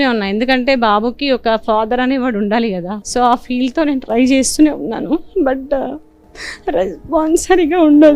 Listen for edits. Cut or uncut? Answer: cut